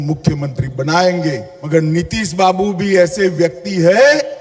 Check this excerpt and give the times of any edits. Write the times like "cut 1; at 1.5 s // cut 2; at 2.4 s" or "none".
cut 1; at 1.5 s